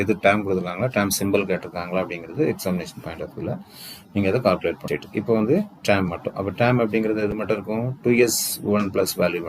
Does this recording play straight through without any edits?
no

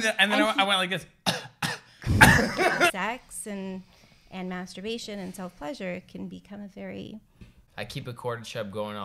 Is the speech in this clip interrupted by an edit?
yes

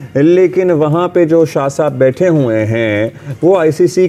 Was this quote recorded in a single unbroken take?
yes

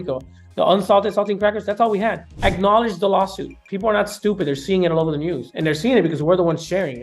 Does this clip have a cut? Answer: yes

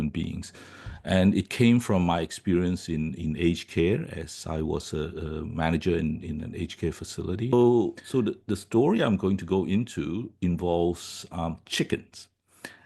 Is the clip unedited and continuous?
no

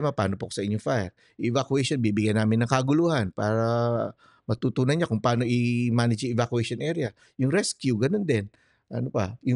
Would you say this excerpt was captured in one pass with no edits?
yes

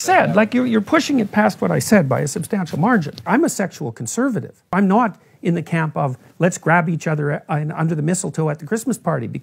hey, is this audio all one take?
no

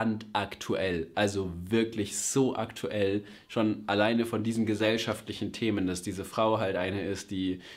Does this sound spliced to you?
no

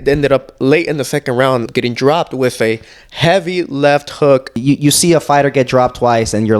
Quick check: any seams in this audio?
yes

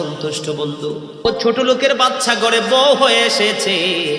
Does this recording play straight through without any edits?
no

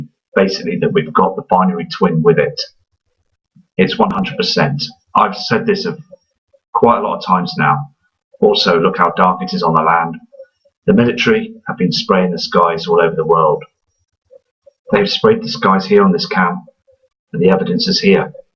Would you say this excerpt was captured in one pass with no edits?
yes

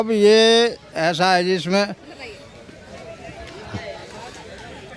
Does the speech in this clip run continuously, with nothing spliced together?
yes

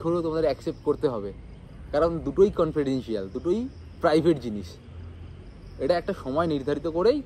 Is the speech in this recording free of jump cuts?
yes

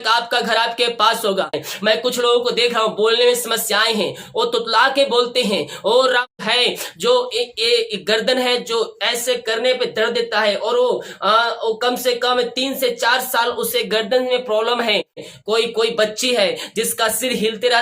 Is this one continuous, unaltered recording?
no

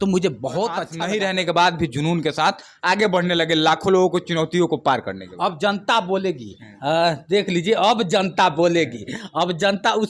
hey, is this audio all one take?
no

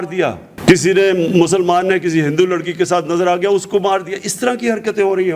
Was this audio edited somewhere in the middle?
no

